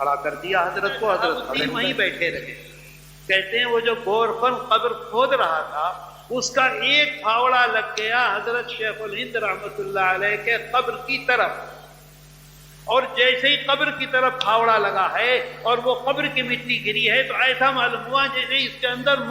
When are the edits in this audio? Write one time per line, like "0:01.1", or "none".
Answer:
0:01.6